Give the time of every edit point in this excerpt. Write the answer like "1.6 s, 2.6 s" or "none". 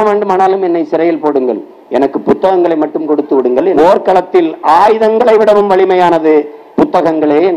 3.8 s